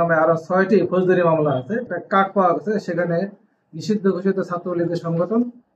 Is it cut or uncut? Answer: cut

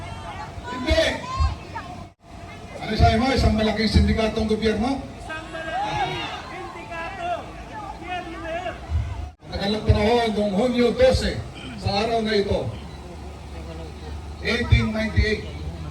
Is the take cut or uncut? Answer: cut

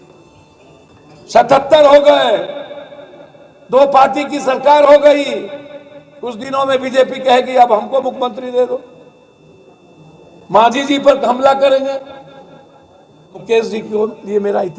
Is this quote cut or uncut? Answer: cut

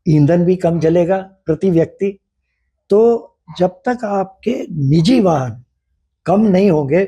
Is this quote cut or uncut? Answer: uncut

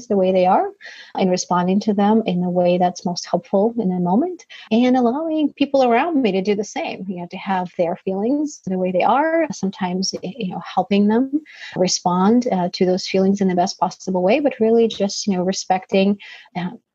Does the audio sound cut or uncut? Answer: uncut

